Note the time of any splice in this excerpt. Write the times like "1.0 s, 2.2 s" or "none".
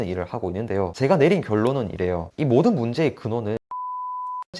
0.9 s